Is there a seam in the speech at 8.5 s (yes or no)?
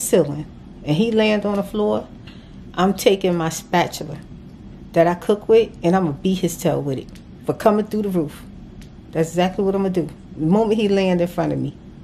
no